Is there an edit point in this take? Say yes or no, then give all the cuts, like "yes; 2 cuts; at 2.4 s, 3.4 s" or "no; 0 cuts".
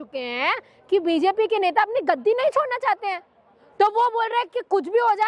no; 0 cuts